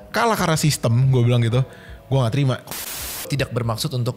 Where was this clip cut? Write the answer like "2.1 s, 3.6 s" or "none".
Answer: 3.2 s